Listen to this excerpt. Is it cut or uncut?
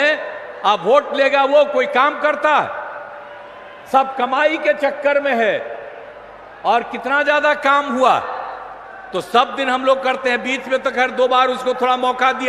uncut